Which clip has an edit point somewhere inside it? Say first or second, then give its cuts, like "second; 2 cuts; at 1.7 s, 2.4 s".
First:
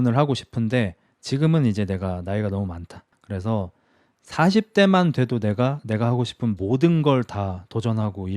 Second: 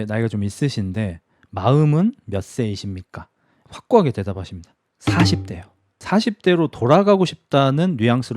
second; 2 cuts; at 3.6 s, 6.0 s